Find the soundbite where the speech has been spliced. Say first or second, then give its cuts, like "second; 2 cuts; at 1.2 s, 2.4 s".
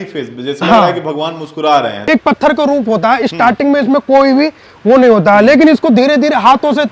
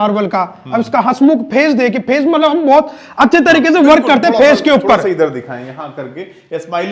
first; 1 cut; at 2.1 s